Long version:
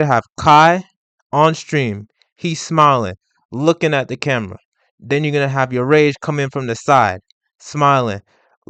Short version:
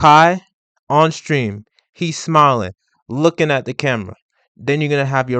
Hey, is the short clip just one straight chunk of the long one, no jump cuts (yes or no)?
yes